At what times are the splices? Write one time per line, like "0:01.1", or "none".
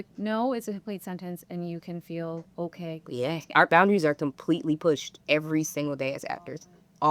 0:02.5